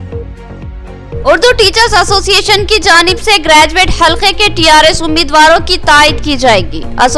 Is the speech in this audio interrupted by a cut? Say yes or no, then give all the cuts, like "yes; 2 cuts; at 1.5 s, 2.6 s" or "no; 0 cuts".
no; 0 cuts